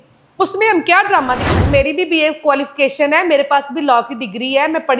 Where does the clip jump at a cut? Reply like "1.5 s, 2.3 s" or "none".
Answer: 1.6 s